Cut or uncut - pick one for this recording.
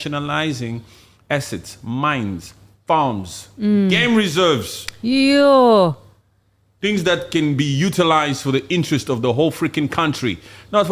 uncut